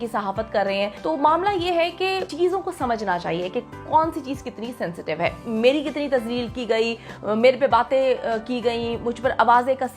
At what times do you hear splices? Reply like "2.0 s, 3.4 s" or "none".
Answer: 1.0 s, 2.3 s, 5.4 s

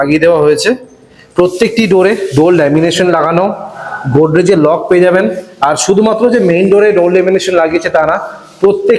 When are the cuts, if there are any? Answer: none

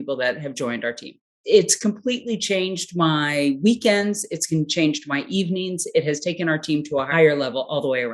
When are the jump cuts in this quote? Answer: 1.4 s, 7.1 s

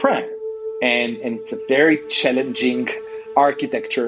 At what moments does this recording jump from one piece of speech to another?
none

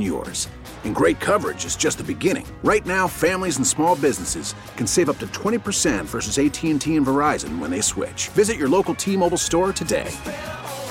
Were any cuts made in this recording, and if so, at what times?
none

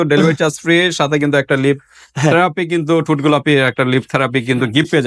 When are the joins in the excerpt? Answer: none

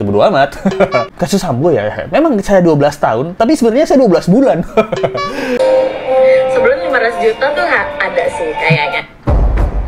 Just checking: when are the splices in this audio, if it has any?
1.1 s, 5.6 s

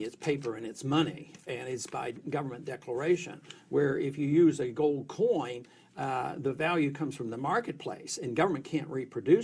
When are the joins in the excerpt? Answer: none

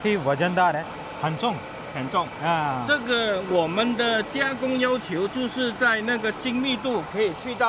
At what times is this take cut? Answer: none

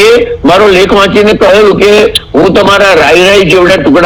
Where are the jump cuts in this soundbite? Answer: none

